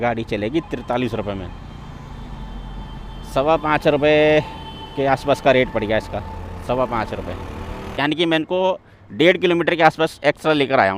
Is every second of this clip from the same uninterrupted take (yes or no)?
no